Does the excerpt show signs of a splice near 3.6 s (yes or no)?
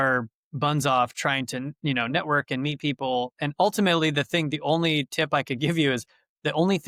no